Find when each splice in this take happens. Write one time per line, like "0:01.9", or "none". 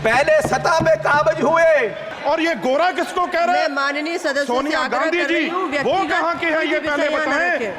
0:02.1